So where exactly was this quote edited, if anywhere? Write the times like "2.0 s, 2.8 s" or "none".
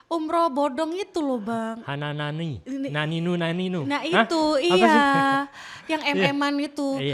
none